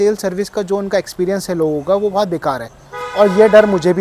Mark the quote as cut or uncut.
uncut